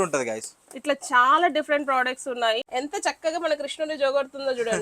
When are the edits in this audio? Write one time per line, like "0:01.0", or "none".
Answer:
0:02.6